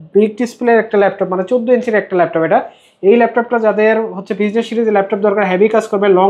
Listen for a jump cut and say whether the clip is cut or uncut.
uncut